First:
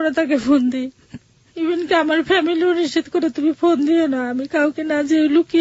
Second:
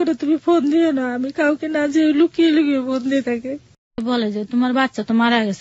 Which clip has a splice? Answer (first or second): second